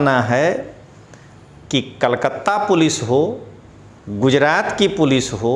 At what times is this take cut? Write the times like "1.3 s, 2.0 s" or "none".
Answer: none